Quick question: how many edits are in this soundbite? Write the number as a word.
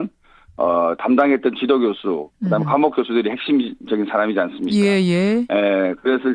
one